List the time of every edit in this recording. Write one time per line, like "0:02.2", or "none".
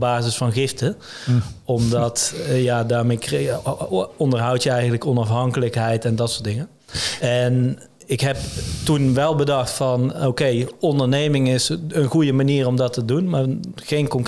none